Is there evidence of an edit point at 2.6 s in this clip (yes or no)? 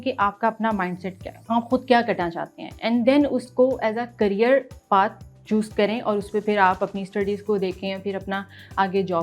no